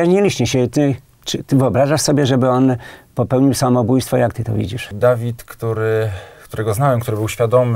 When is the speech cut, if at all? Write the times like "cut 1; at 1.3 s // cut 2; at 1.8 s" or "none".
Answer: cut 1; at 4.9 s